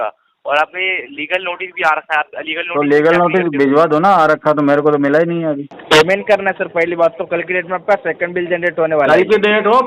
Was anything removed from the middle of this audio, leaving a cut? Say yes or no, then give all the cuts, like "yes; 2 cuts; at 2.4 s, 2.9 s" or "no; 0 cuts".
yes; 1 cut; at 5.7 s